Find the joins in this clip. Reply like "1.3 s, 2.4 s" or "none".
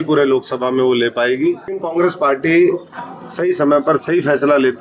1.8 s